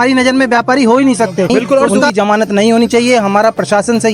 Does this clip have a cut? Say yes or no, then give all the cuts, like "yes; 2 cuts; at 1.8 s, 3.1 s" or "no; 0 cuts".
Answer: yes; 1 cut; at 2.1 s